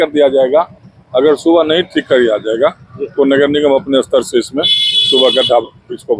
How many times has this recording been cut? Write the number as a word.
zero